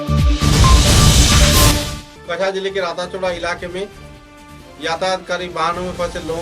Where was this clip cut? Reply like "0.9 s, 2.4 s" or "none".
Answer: 2.0 s